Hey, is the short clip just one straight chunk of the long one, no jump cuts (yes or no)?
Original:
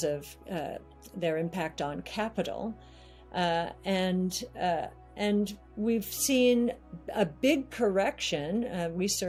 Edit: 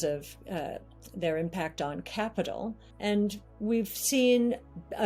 no